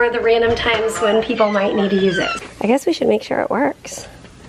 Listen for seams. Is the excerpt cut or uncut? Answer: cut